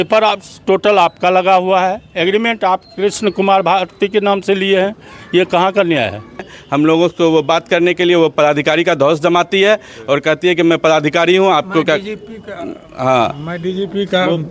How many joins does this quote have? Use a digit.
1